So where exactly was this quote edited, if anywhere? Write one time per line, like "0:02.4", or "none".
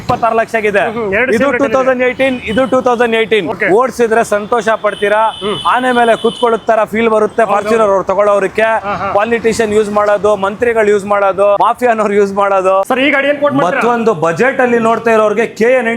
0:03.5
0:11.6
0:12.9